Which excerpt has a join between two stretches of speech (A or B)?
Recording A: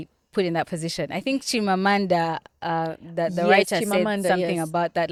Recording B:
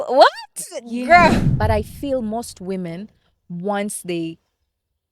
B